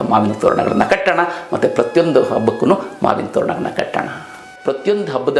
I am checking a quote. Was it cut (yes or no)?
yes